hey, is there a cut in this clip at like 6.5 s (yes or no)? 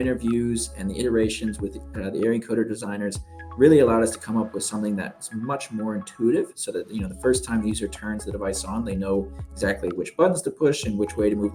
no